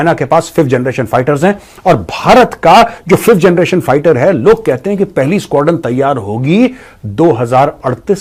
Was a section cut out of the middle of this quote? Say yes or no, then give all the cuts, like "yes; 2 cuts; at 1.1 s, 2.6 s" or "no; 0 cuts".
no; 0 cuts